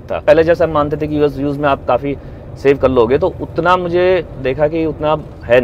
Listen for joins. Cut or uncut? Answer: uncut